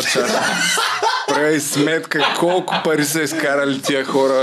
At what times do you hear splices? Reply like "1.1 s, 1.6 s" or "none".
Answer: none